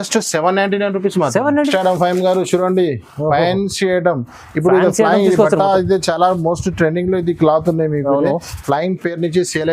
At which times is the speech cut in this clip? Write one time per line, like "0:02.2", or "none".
0:01.7